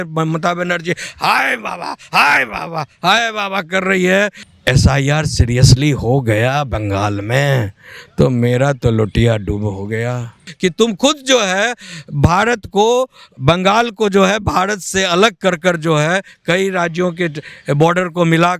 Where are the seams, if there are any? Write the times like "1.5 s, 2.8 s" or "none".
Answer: 10.5 s